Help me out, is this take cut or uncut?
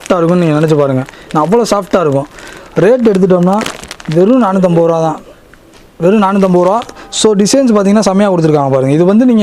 uncut